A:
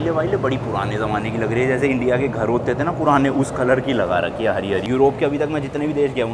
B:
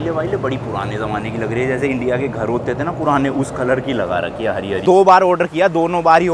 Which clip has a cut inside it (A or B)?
B